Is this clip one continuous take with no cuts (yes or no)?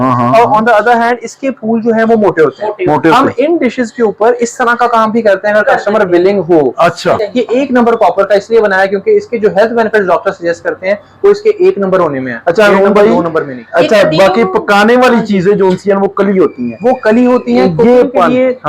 no